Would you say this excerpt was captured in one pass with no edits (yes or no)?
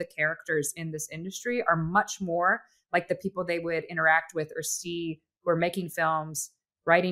yes